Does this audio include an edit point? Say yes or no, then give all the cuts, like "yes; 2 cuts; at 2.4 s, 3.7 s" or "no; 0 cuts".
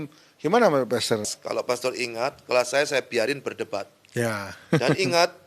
yes; 1 cut; at 1.3 s